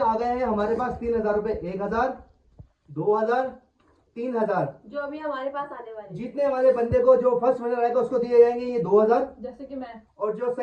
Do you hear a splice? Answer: no; 0 cuts

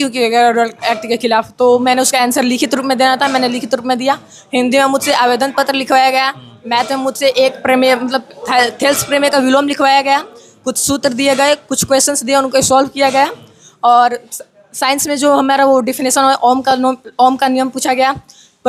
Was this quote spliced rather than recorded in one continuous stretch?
no; 0 cuts

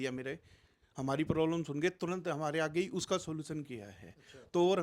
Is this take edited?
no; 0 cuts

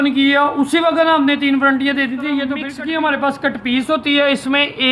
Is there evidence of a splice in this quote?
yes; 1 cut; at 2.7 s

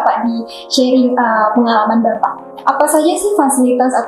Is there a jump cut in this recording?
yes; 1 cut; at 2.5 s

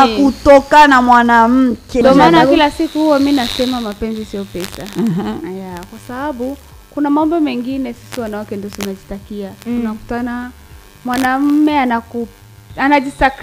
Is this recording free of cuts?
no; 1 cut; at 2.0 s

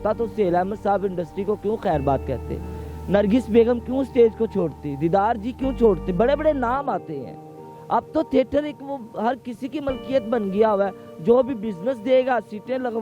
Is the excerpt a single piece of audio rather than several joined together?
yes; 0 cuts

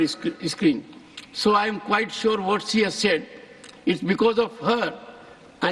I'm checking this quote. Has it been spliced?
no; 0 cuts

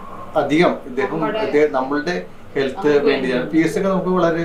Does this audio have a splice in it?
no; 0 cuts

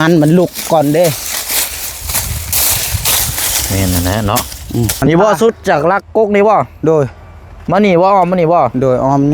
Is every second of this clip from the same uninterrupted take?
no; 1 cut; at 5.0 s

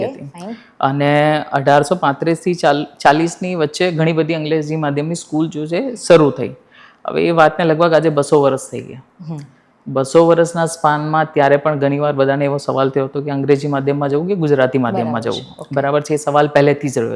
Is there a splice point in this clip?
no; 0 cuts

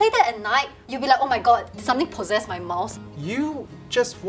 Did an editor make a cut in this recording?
yes; 1 cut; at 2.9 s

